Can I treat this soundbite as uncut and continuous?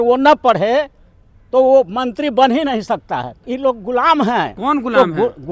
no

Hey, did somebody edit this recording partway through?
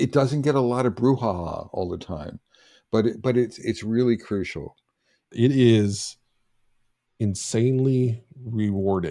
yes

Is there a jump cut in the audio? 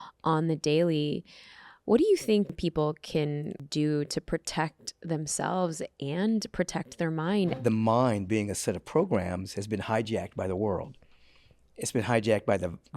yes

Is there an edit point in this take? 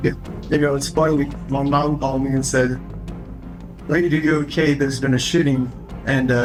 no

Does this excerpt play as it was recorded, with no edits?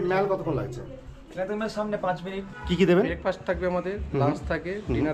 no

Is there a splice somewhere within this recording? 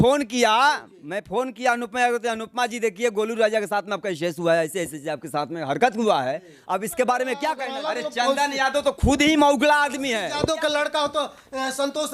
yes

